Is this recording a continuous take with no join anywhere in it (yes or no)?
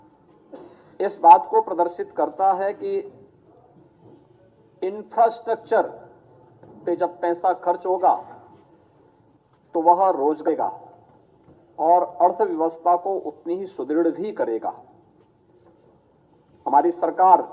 no